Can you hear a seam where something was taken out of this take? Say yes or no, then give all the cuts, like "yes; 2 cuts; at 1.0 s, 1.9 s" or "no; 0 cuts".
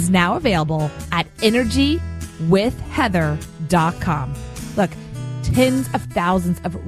no; 0 cuts